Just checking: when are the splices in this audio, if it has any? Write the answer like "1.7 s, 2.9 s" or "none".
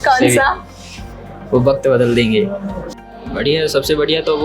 2.8 s